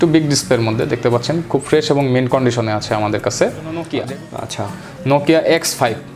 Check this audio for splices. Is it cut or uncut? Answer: cut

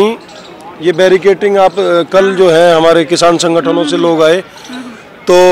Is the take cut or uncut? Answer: uncut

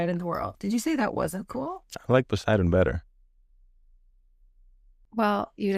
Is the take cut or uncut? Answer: uncut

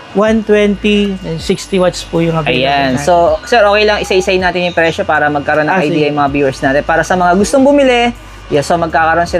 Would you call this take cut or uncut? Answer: uncut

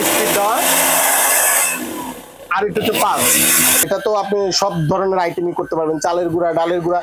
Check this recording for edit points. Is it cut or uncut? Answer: cut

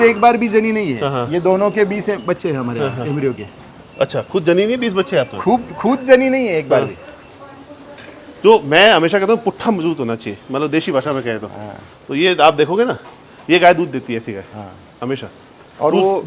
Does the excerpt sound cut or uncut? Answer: uncut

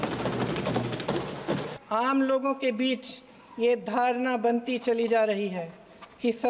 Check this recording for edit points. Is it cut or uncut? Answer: cut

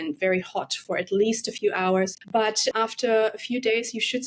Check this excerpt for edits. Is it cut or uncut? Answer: cut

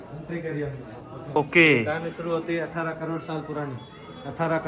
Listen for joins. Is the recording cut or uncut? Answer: cut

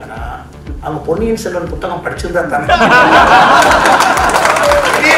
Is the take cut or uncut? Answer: uncut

